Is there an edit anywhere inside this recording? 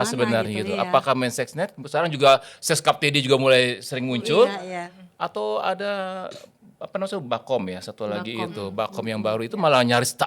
no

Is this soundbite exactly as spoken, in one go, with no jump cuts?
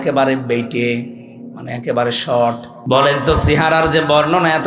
no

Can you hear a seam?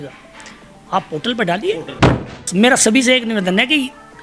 yes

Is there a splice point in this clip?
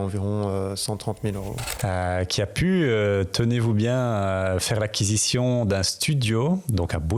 no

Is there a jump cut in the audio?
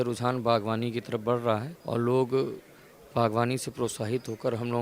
no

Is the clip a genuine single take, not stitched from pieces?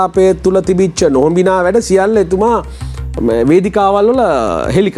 yes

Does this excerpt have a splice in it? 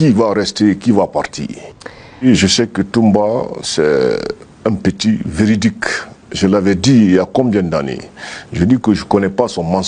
yes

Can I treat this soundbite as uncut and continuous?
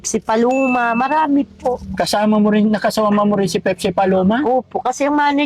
yes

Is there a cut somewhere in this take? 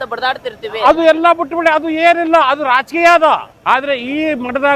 yes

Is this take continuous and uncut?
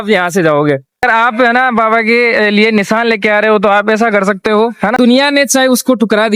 no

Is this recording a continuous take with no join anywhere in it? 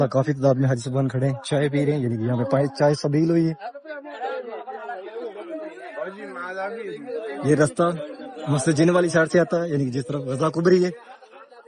yes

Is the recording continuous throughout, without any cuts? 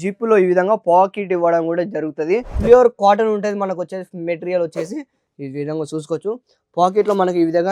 no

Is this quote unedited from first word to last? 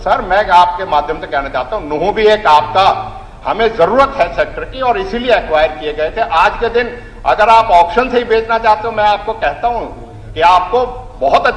yes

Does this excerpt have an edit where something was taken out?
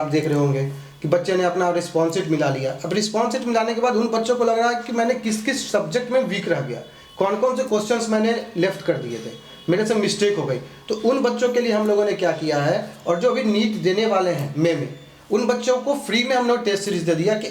no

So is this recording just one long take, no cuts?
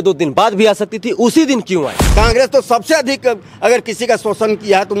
no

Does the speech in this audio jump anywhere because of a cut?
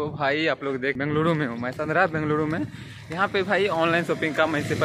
yes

